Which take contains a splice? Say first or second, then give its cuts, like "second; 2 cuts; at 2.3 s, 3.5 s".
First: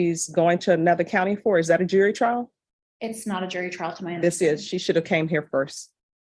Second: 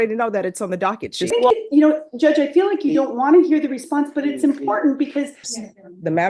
second; 2 cuts; at 1.3 s, 5.5 s